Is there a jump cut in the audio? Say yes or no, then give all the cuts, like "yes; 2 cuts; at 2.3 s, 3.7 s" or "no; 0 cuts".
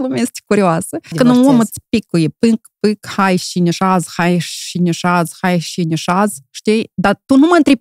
yes; 1 cut; at 1.2 s